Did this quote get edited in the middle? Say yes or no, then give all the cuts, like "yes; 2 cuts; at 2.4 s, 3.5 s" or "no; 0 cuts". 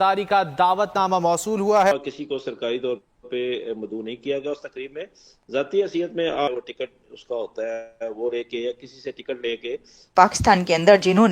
yes; 3 cuts; at 1.9 s, 6.5 s, 10.0 s